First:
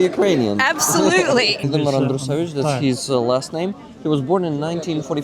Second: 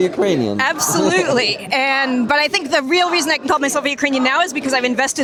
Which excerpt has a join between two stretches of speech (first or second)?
first